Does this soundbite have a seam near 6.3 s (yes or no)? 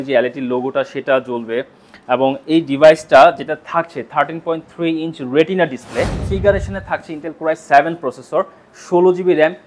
yes